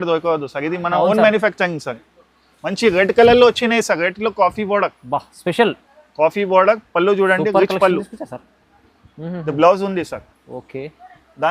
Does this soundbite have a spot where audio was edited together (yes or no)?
no